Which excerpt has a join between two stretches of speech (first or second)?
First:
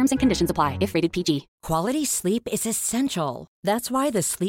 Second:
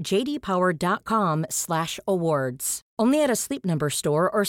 first